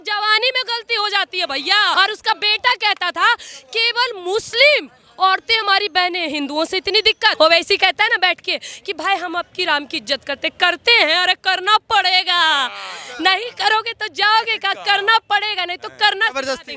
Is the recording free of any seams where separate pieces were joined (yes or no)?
no